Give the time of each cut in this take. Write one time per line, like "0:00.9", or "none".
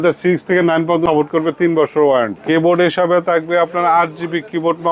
0:01.0
0:02.4